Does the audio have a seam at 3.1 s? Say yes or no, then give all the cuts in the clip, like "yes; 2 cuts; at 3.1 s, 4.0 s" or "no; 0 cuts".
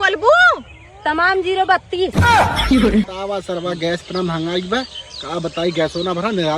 yes; 1 cut; at 3.1 s